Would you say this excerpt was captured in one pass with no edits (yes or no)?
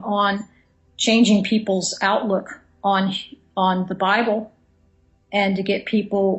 no